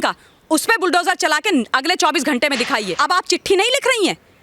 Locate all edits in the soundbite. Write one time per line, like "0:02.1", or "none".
0:02.9